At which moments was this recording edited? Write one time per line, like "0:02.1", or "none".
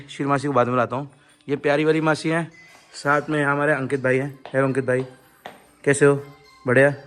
none